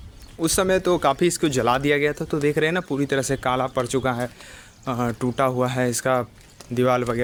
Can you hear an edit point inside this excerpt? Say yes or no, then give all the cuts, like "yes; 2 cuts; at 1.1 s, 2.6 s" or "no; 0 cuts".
no; 0 cuts